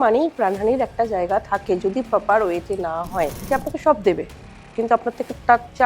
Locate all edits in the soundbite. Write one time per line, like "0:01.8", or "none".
0:03.4

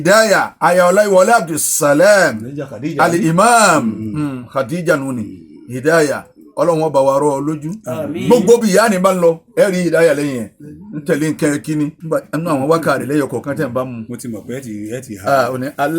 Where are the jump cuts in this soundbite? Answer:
0:12.0

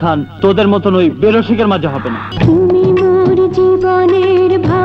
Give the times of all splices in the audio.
0:02.2

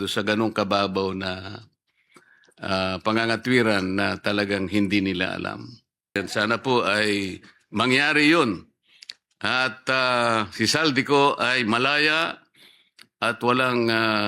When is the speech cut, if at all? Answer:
0:06.2

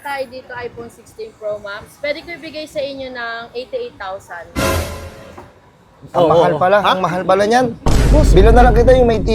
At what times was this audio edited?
none

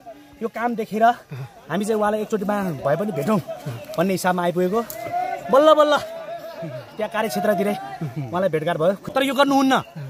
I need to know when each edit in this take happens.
0:09.1

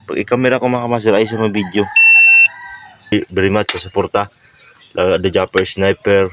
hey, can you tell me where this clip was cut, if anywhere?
0:03.1

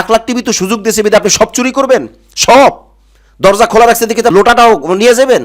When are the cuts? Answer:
0:04.3

